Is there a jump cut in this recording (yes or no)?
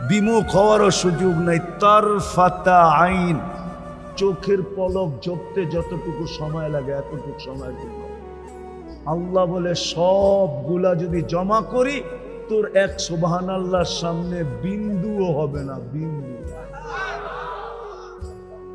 yes